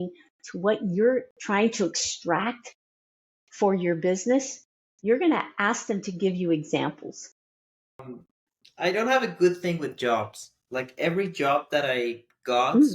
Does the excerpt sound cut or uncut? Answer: cut